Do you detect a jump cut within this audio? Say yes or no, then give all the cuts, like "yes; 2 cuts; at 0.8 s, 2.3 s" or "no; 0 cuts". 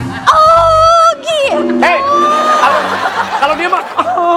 no; 0 cuts